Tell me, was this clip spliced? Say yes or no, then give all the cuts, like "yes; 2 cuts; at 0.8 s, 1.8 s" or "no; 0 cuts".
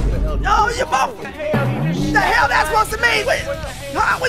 yes; 1 cut; at 1.3 s